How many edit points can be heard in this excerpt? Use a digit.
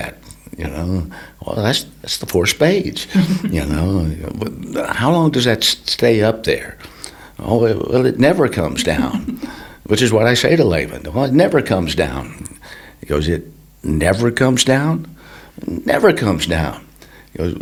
0